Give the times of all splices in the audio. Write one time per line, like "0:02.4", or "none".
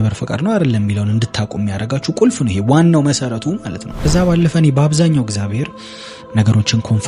0:03.9